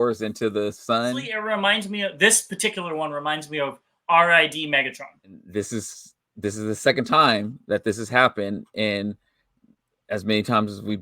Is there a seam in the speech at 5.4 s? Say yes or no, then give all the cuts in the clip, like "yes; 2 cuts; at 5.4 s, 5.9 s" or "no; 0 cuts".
yes; 2 cuts; at 1.3 s, 5.4 s